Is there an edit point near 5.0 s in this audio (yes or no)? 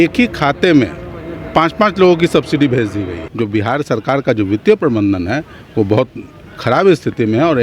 no